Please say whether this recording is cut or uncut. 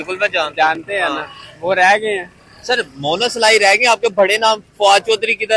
uncut